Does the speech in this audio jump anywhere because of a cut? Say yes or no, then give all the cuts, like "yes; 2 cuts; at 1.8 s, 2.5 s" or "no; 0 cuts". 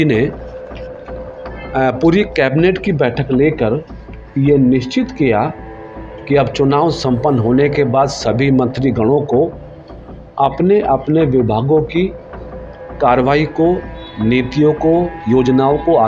no; 0 cuts